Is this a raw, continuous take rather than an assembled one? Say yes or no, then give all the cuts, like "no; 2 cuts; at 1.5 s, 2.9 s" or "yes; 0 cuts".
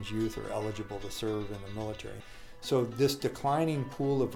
no; 1 cut; at 2.1 s